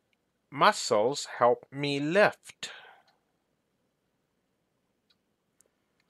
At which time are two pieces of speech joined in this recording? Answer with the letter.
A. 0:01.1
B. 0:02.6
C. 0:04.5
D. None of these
C